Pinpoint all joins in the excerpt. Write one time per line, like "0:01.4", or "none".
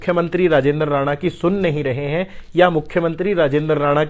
none

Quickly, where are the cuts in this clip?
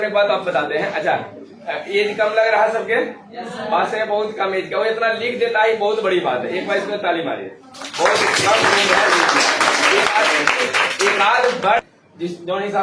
0:11.8

